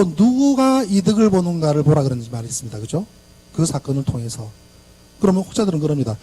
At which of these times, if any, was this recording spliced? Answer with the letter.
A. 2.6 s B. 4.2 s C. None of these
B